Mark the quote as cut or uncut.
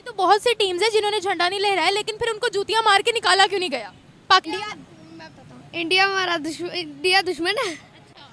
cut